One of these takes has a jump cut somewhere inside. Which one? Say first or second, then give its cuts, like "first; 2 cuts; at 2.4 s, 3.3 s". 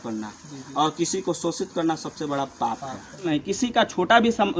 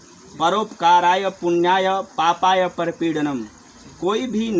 first; 1 cut; at 3.3 s